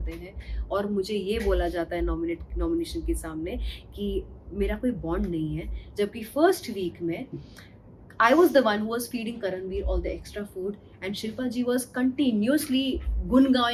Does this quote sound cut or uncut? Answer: uncut